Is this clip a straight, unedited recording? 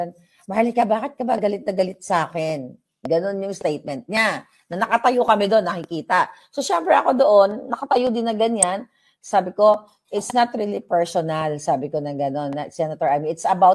yes; 0 cuts

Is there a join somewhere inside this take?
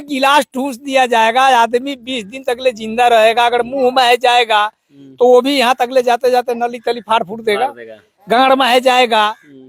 no; 0 cuts

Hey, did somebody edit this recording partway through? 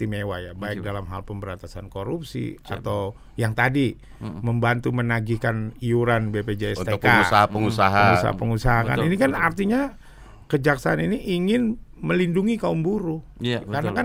no; 0 cuts

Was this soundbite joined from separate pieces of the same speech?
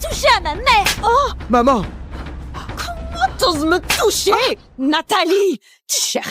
no; 0 cuts

